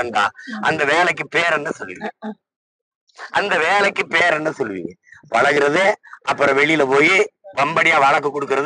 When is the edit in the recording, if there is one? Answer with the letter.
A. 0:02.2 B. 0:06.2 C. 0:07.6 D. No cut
D